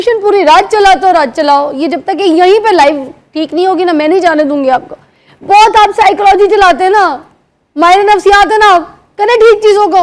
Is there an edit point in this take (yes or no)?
no